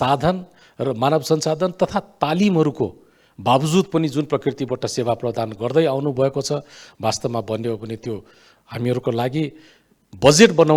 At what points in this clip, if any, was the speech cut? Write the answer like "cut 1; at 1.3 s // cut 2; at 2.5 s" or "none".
none

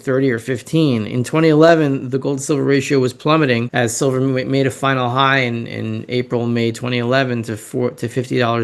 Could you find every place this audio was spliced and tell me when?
cut 1; at 3.7 s

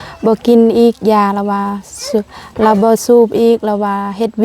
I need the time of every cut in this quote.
none

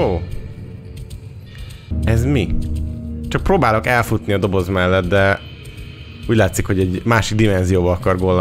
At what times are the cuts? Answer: cut 1; at 1.9 s

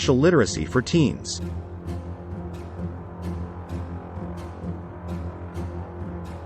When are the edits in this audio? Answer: cut 1; at 1.2 s

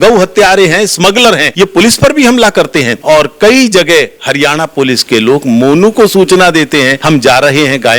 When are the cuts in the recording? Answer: cut 1; at 1.5 s // cut 2; at 2.9 s // cut 3; at 7.0 s

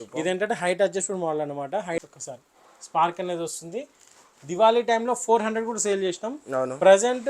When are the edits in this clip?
cut 1; at 2.0 s

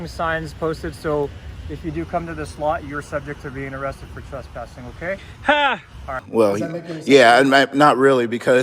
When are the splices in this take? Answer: cut 1; at 6.2 s

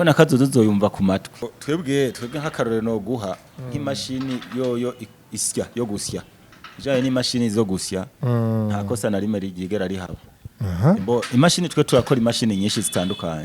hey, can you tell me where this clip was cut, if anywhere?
cut 1; at 1.5 s // cut 2; at 11.0 s

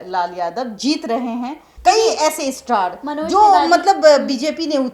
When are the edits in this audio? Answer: cut 1; at 1.6 s

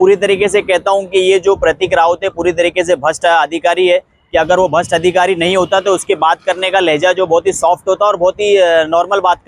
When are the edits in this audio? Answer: none

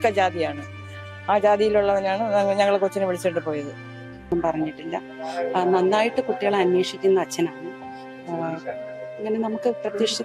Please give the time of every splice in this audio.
cut 1; at 4.3 s

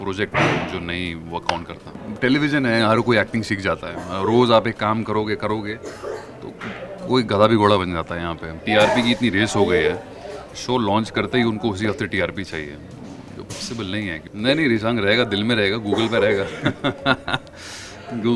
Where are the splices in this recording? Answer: cut 1; at 2.0 s // cut 2; at 8.6 s // cut 3; at 14.2 s

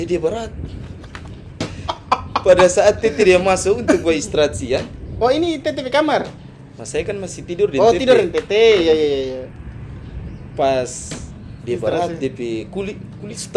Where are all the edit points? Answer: none

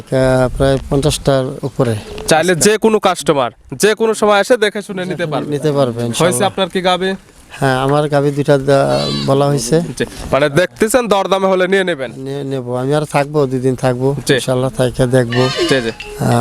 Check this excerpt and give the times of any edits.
none

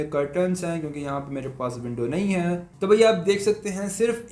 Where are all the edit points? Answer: cut 1; at 2.7 s

